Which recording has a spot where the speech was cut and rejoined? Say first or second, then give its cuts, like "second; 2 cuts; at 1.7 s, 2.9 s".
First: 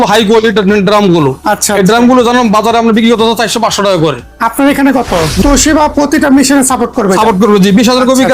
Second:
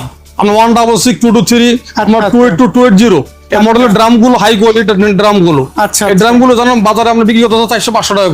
first; 1 cut; at 5.4 s